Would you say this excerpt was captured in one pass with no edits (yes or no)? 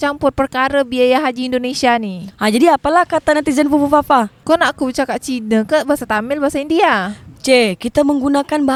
yes